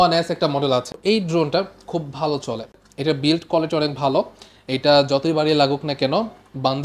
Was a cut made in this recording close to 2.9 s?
yes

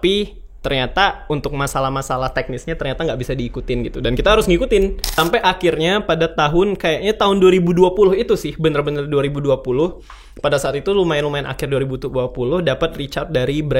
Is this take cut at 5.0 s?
yes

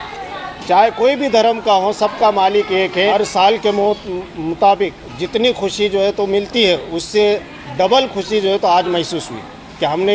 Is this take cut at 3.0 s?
yes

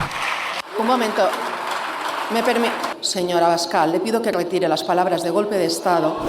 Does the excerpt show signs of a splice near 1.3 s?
no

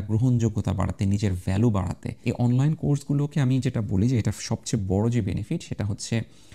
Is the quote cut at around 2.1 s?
yes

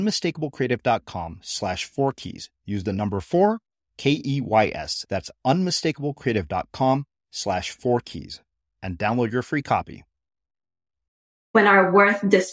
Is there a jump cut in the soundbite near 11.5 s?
yes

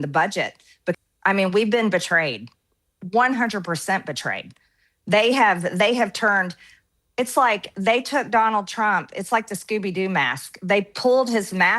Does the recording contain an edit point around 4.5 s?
no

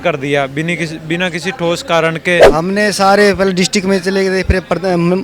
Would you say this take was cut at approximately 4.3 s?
no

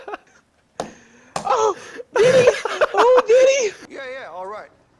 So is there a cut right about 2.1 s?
no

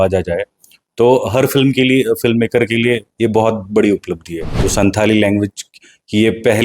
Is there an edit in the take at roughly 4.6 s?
yes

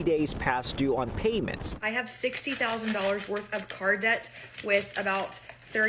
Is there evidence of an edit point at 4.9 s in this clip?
no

